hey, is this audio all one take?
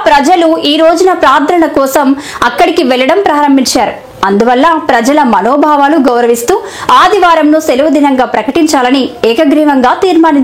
yes; 0 cuts

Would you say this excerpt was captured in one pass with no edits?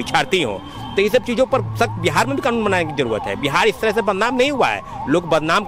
yes; 0 cuts

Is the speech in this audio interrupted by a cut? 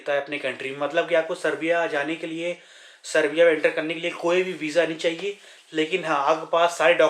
no; 0 cuts

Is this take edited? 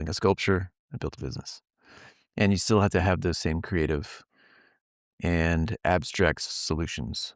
no; 0 cuts

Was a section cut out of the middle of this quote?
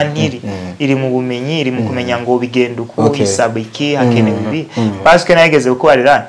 no; 0 cuts

